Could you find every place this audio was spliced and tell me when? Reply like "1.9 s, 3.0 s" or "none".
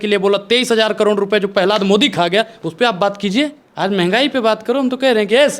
3.6 s